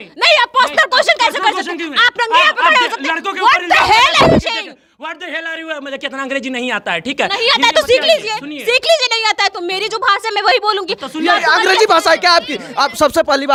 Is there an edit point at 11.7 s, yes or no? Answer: no